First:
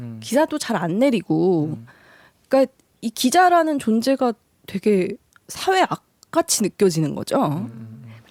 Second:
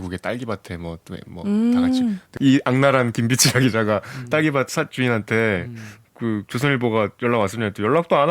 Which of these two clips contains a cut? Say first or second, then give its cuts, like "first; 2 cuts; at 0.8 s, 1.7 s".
second; 1 cut; at 2.3 s